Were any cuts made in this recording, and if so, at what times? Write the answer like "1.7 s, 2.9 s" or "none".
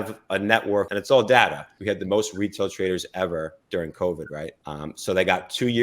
0.9 s, 1.7 s, 4.6 s